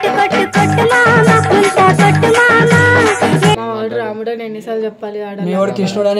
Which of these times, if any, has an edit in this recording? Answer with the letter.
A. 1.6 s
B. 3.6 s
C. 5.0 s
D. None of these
B